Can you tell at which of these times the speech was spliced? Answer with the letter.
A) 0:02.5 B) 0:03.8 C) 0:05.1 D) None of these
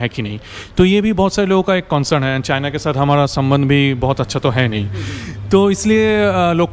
D